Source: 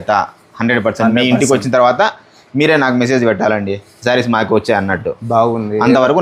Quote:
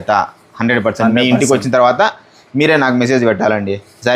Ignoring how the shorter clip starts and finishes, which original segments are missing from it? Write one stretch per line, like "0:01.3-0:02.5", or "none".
none